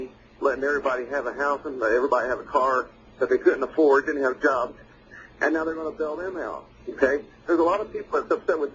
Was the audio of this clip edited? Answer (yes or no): yes